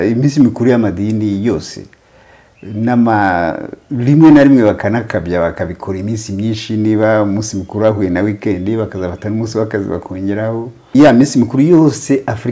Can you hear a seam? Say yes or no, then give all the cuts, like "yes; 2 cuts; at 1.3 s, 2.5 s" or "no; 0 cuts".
yes; 1 cut; at 10.9 s